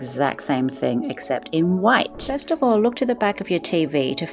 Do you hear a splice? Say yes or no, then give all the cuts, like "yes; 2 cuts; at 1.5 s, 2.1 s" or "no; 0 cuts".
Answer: yes; 1 cut; at 2.3 s